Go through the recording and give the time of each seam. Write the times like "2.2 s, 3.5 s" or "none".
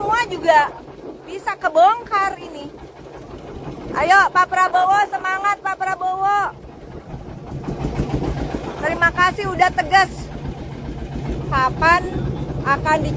11.0 s

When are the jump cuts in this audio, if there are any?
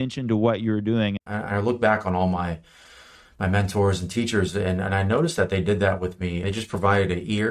1.1 s, 6.4 s

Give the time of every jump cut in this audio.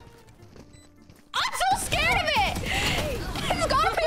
none

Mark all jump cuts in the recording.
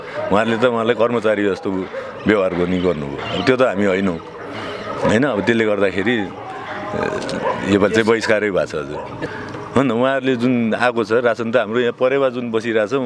9.2 s

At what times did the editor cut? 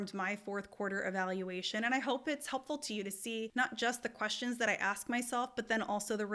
3.5 s

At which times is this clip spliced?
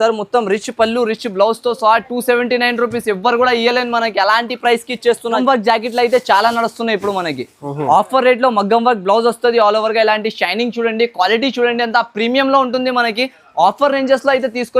5.4 s

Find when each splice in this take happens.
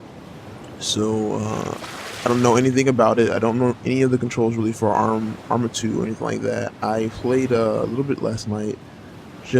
5.3 s

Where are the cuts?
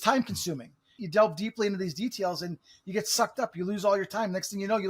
0.9 s

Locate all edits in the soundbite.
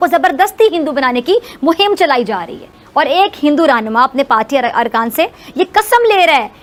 none

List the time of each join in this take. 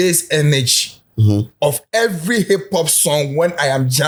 none

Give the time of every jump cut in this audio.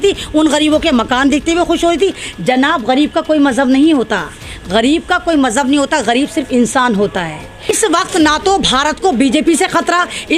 7.8 s

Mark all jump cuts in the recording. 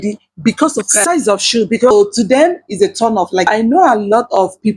1.9 s, 3.5 s

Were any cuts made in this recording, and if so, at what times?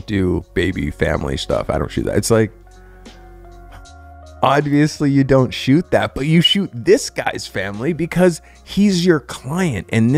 none

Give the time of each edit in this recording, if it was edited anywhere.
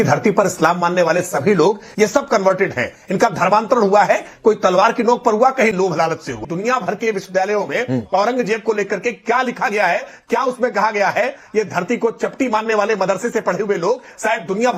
1.8 s, 6.3 s

